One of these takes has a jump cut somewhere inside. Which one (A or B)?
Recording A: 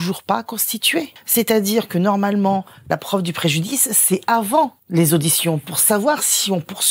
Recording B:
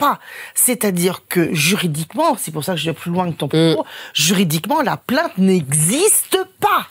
A